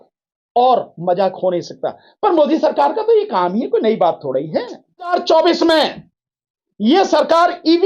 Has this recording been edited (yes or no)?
yes